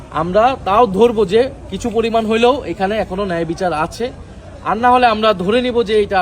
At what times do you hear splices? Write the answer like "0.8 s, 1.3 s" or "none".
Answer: none